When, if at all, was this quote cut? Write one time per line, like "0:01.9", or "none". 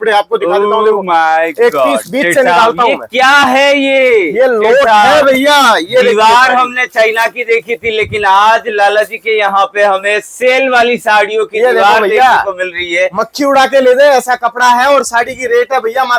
none

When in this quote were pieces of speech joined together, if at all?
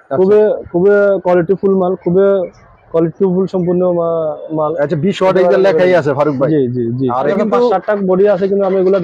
0:07.3

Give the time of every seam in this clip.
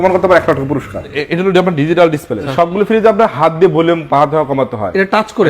0:01.2
0:02.5

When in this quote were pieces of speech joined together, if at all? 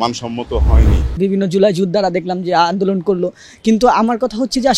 0:01.1

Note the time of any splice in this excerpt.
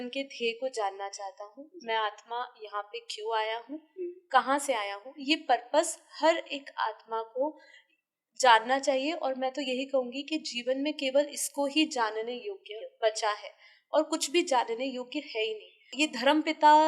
0:15.9

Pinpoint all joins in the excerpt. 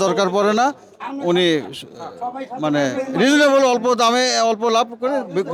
none

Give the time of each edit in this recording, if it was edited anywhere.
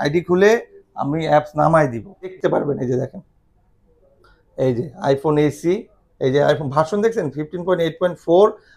0:02.4

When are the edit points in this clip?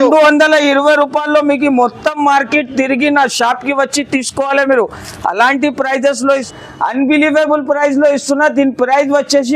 0:06.5

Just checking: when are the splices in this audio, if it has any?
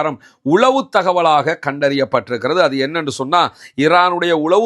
none

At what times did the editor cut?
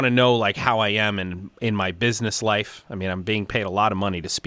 none

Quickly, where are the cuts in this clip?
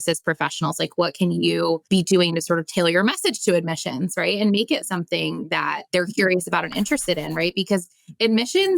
0:01.8
0:05.8

